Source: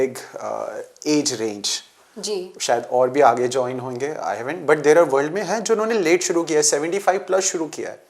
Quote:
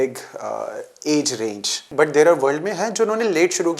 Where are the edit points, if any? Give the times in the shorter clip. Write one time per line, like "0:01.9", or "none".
0:01.8